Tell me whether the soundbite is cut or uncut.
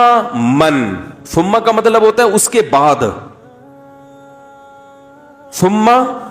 cut